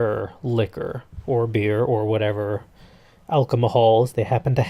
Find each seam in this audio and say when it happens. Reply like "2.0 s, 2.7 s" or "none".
1.9 s

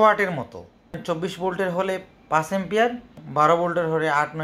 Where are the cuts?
1.0 s, 3.2 s

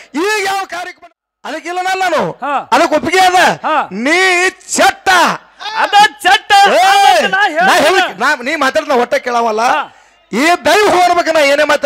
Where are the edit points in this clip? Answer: 0.9 s

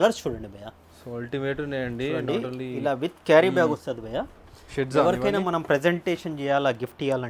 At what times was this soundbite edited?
none

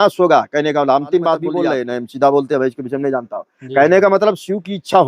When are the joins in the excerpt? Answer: 1.7 s

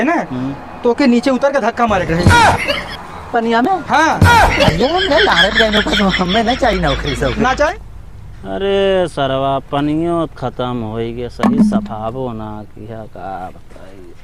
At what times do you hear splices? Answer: 7.7 s

